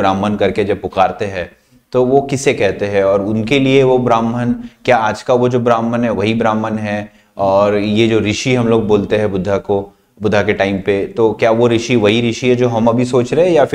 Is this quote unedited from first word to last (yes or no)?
yes